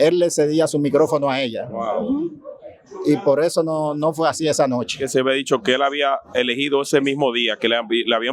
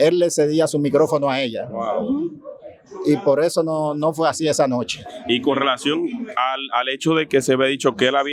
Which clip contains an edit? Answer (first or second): first